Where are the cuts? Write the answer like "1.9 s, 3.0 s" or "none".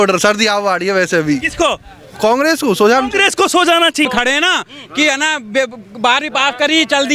4.1 s